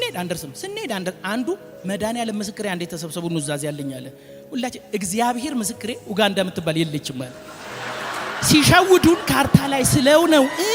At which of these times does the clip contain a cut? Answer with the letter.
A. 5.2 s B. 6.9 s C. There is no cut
C